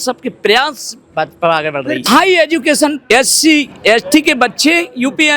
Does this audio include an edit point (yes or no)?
yes